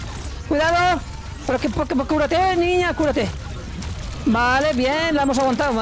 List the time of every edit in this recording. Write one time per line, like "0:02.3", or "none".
none